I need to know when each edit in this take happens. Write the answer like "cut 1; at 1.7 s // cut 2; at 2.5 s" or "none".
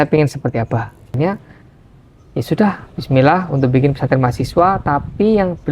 cut 1; at 1.2 s